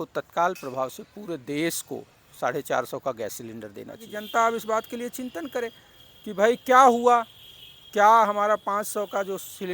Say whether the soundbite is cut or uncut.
cut